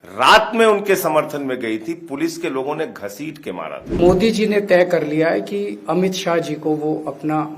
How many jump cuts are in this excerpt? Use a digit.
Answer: 1